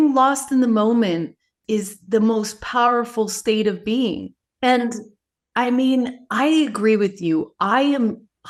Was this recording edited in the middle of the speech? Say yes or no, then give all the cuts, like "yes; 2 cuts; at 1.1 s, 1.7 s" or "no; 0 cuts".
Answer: no; 0 cuts